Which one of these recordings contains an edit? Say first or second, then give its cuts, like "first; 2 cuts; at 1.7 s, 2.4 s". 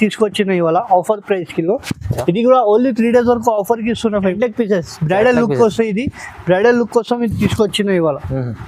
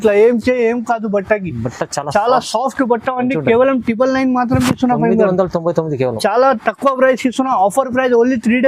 first; 1 cut; at 4.3 s